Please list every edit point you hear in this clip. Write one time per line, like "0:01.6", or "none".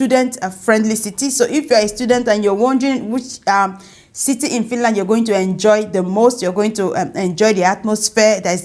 none